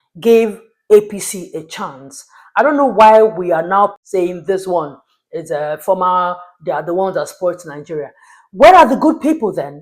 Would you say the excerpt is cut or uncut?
cut